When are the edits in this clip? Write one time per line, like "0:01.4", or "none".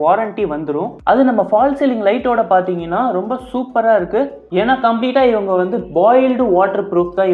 0:01.0
0:04.5